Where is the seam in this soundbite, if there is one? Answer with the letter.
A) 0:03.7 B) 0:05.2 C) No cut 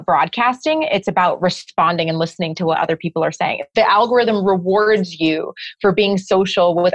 A